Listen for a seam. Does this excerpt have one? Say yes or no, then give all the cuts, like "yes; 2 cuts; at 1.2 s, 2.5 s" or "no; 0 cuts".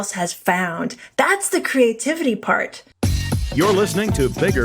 yes; 1 cut; at 2.8 s